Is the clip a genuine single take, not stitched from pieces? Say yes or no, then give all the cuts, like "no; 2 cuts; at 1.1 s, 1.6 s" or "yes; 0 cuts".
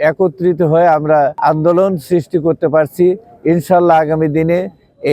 no; 1 cut; at 1.4 s